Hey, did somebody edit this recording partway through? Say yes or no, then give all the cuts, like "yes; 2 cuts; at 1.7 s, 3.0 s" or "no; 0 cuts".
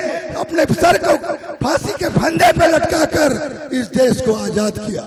no; 0 cuts